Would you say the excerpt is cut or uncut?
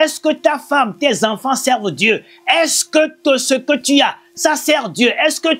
uncut